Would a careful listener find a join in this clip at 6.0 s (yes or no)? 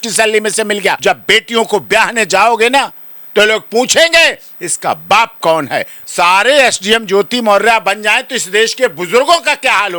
yes